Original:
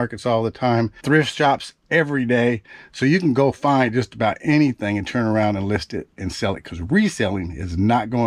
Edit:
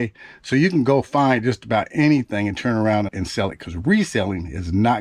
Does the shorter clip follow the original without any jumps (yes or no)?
no